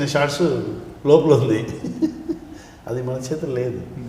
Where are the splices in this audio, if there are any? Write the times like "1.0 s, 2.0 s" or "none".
none